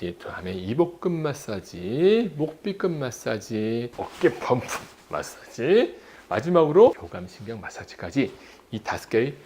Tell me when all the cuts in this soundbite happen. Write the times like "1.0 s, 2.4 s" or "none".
4.0 s, 7.0 s